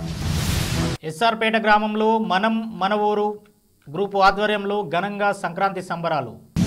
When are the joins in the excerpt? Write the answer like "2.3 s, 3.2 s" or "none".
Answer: 1.0 s

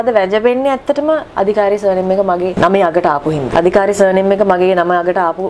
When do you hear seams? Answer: 2.5 s, 3.5 s

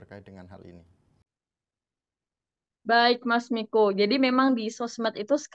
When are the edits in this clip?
none

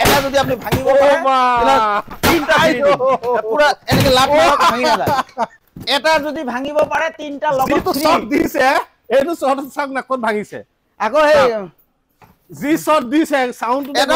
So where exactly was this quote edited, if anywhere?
none

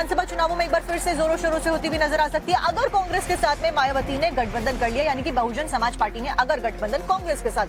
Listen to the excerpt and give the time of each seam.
none

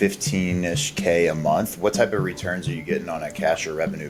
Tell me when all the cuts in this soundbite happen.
none

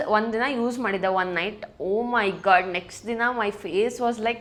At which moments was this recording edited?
none

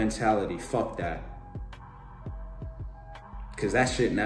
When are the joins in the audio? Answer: 1.2 s, 3.0 s

